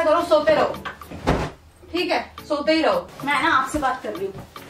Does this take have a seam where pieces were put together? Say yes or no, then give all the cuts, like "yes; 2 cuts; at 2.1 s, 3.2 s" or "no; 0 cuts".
yes; 1 cut; at 3.1 s